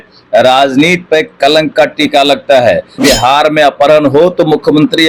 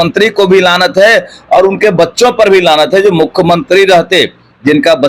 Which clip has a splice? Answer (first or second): first